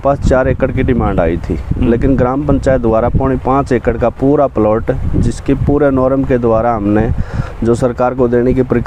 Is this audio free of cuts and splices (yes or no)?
yes